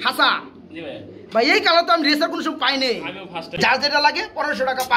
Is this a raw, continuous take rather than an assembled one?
no; 1 cut; at 3.6 s

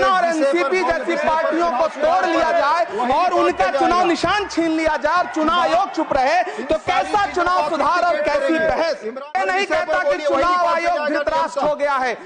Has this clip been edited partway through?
yes; 1 cut; at 9.2 s

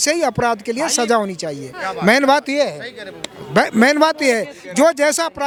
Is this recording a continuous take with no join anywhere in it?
yes; 0 cuts

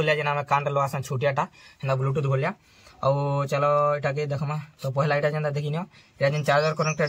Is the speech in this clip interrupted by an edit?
no; 0 cuts

